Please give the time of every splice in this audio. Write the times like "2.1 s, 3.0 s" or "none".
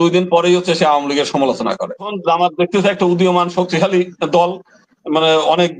2.1 s